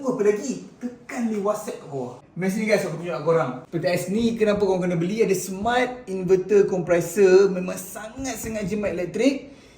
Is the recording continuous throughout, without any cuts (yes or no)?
no